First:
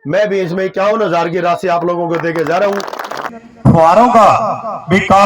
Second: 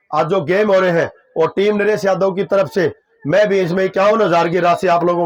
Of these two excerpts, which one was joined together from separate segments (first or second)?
first